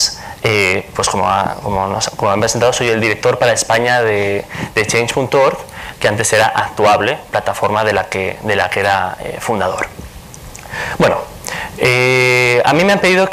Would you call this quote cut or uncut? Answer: cut